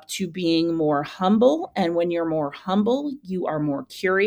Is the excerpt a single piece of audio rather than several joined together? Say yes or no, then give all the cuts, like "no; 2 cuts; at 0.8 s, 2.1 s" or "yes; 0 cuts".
yes; 0 cuts